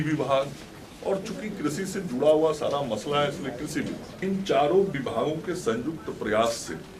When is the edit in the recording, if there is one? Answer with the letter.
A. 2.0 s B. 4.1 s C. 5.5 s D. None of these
B